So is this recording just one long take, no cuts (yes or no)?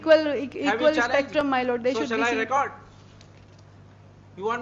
yes